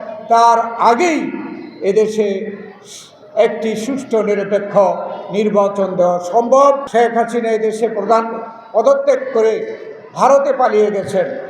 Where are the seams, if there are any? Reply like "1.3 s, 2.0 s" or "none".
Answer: 6.8 s